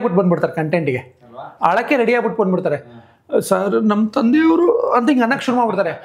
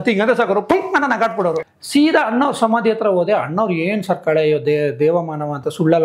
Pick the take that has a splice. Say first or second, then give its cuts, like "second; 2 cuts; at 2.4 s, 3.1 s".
second; 1 cut; at 1.7 s